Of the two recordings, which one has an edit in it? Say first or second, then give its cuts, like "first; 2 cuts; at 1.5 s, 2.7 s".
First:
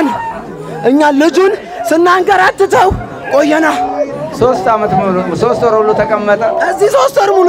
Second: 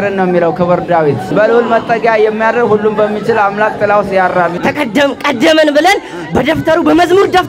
second; 2 cuts; at 1.3 s, 4.5 s